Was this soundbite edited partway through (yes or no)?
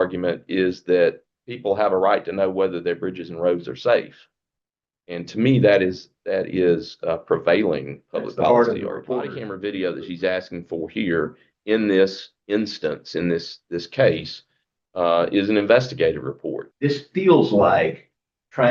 yes